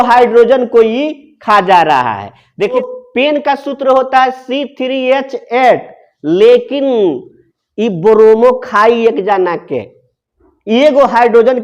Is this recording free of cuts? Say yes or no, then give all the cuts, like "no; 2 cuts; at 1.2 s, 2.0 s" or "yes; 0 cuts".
no; 1 cut; at 2.8 s